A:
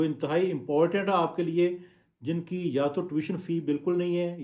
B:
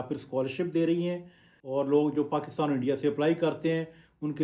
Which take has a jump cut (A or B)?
B